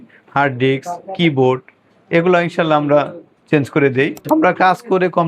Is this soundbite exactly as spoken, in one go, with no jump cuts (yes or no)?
no